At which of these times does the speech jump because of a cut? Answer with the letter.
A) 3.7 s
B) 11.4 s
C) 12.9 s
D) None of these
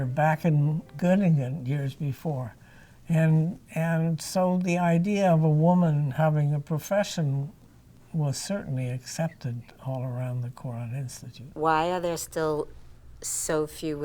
B